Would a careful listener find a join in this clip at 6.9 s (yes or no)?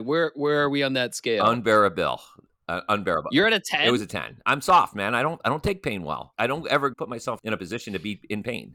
yes